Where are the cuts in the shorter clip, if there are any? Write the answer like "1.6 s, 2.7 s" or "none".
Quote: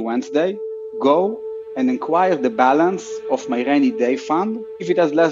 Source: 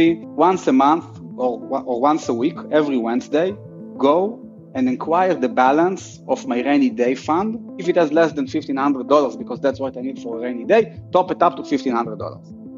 none